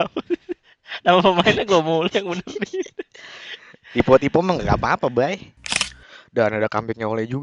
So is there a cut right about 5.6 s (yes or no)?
yes